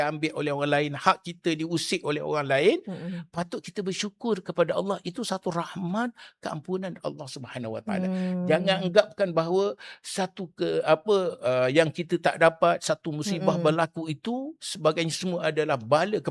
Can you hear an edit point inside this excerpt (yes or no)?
no